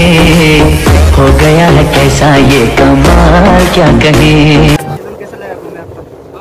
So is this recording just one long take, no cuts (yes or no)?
no